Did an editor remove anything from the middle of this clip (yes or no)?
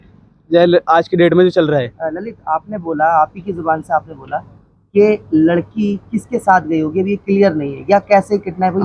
no